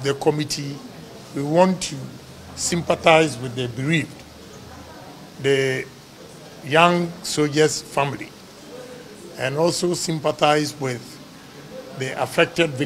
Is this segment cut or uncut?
uncut